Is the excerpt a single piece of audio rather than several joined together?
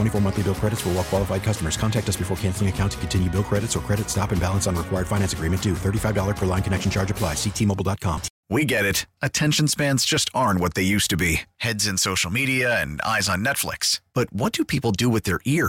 no; 1 cut; at 8.3 s

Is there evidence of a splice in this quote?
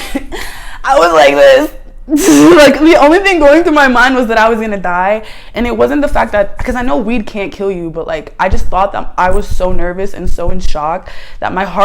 no; 0 cuts

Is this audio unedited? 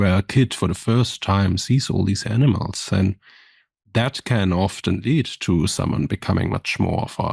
yes; 0 cuts

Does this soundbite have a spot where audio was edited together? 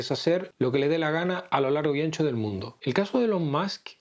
yes; 1 cut; at 2.7 s

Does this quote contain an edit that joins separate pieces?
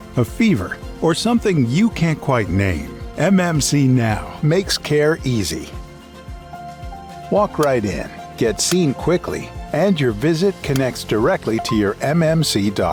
no; 0 cuts

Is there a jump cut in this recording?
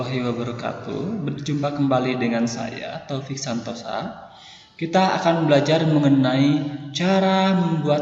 yes; 1 cut; at 1.4 s

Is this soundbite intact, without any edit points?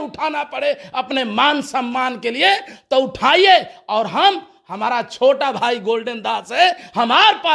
yes; 0 cuts

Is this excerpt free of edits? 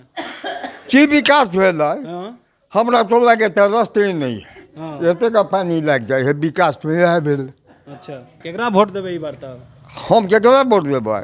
no; 1 cut; at 8.5 s

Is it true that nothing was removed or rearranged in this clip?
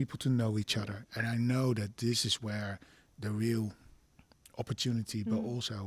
yes; 0 cuts

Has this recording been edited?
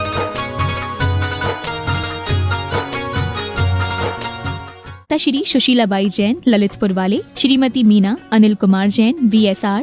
yes; 2 cuts; at 1.0 s, 5.1 s

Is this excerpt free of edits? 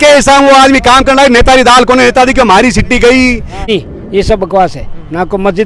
no; 1 cut; at 3.7 s

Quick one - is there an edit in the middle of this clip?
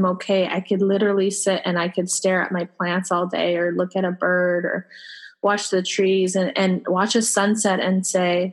no; 0 cuts

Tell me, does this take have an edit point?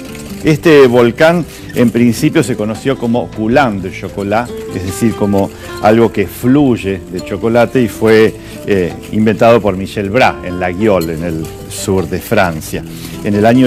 yes; 1 cut; at 7.3 s

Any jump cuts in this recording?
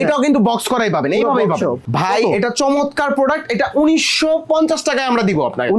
yes; 1 cut; at 1.8 s

